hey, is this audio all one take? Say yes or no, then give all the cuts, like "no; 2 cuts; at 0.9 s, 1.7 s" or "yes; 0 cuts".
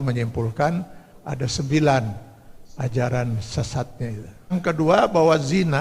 no; 1 cut; at 4.5 s